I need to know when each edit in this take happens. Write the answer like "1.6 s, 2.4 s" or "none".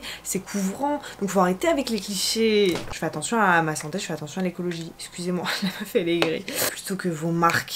2.8 s, 6.7 s